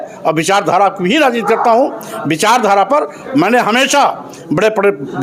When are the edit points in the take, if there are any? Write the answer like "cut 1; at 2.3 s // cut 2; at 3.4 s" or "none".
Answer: none